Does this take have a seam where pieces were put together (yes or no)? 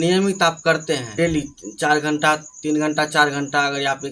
yes